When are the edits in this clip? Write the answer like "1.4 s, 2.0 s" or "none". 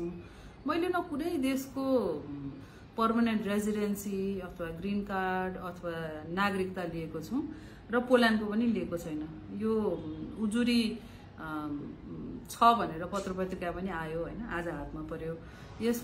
none